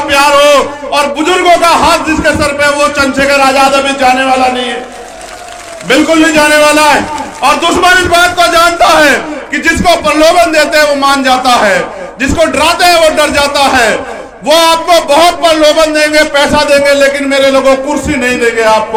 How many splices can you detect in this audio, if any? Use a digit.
0